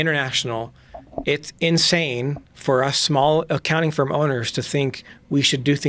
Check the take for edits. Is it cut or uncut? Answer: uncut